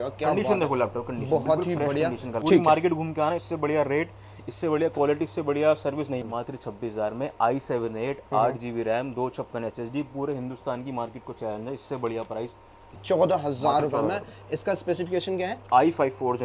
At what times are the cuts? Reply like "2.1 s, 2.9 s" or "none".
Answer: 2.3 s, 6.2 s, 12.9 s